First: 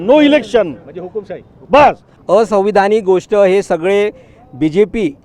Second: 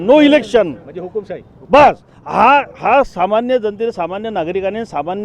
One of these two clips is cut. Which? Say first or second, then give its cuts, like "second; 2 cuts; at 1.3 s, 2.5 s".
first; 1 cut; at 2.1 s